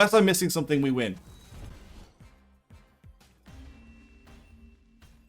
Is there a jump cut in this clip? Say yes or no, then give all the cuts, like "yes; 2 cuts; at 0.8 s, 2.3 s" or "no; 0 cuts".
yes; 1 cut; at 1.7 s